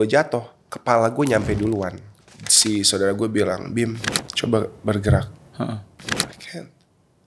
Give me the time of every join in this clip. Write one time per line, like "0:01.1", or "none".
0:02.0